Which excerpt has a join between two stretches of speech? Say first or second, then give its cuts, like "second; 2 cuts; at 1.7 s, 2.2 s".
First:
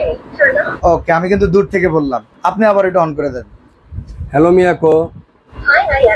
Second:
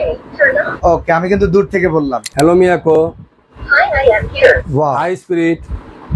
second; 1 cut; at 2.2 s